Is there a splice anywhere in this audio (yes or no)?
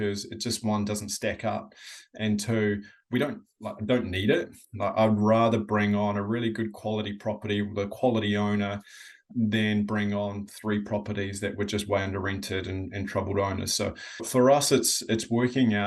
yes